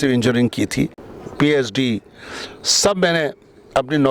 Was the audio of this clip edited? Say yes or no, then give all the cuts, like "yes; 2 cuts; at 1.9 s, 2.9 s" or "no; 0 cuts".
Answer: yes; 1 cut; at 1.1 s